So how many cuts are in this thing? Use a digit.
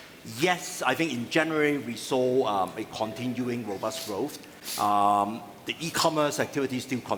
0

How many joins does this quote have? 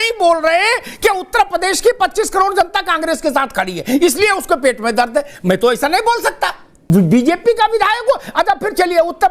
1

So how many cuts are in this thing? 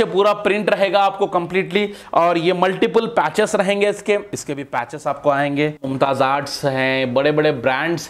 2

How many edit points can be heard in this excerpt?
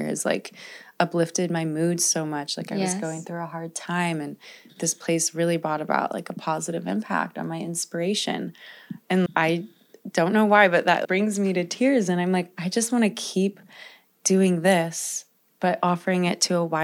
2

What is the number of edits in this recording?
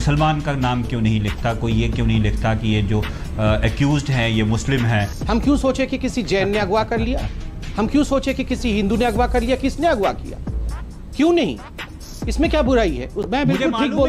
2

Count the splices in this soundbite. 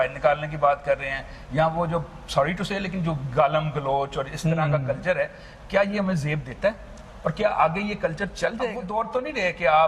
1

